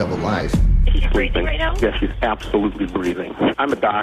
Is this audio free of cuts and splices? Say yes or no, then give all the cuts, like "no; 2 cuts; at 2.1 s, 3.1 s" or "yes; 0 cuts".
yes; 0 cuts